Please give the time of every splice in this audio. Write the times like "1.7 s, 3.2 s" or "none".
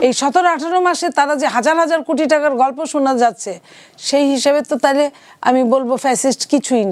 none